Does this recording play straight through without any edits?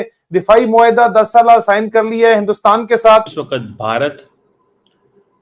no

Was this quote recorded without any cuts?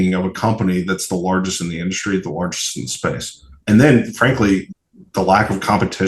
no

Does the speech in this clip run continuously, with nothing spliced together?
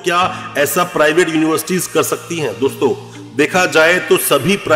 yes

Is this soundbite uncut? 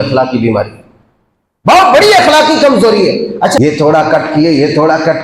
no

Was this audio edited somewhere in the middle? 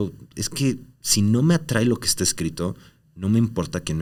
no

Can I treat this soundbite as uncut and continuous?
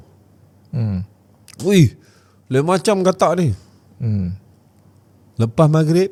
yes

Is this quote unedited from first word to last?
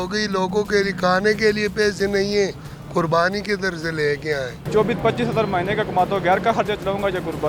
no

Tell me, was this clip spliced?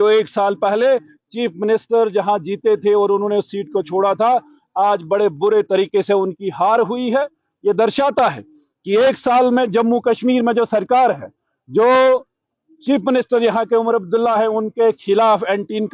no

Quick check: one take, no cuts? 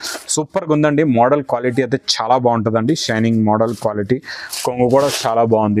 yes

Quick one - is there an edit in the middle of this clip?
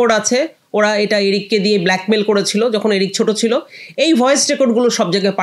no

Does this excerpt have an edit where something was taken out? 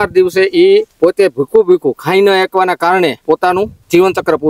yes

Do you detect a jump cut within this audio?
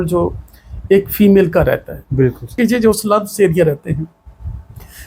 yes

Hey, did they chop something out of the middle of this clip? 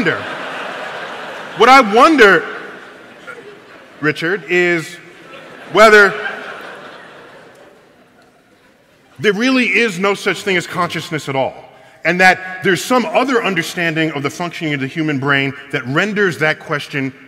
no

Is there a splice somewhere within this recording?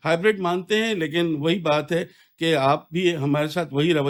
no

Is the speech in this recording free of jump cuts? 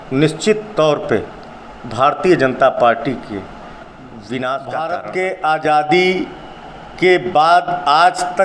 no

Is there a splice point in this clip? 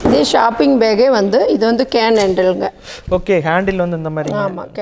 no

